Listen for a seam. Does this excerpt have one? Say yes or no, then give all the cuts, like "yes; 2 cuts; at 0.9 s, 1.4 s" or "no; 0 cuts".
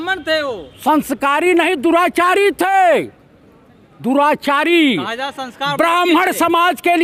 no; 0 cuts